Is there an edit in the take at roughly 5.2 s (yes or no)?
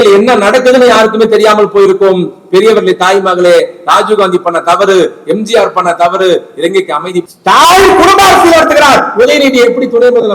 no